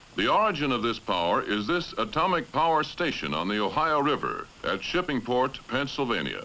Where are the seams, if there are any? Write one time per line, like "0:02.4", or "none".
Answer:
0:04.5